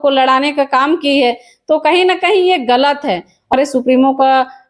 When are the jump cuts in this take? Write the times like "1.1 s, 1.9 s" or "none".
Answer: 3.5 s